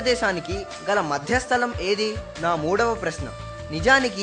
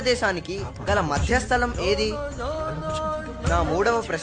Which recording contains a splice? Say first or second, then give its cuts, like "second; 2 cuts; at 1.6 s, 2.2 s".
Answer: first; 1 cut; at 2.3 s